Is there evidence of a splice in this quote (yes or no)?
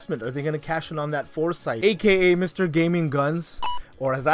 yes